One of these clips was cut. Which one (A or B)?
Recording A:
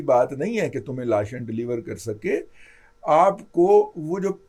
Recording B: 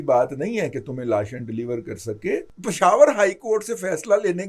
B